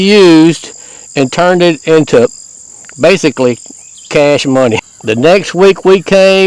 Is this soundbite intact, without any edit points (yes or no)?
no